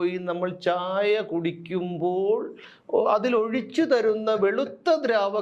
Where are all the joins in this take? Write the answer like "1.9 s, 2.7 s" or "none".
none